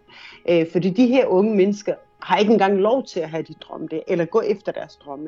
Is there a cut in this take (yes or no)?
no